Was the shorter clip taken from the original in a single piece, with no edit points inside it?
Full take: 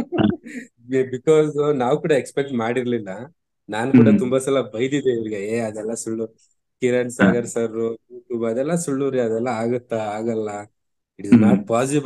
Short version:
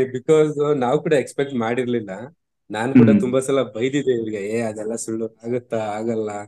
no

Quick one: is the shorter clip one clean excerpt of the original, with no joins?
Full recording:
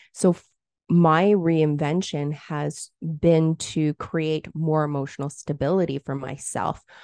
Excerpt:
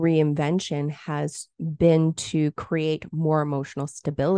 yes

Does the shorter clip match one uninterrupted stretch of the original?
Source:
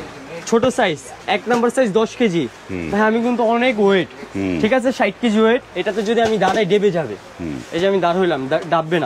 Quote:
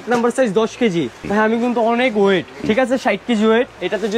no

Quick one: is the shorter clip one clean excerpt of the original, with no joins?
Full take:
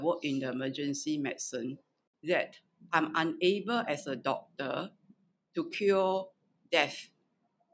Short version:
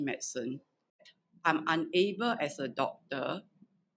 no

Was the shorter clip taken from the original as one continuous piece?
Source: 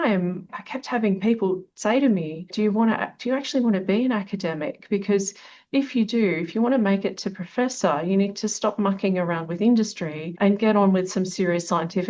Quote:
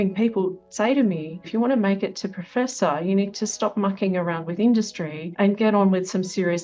no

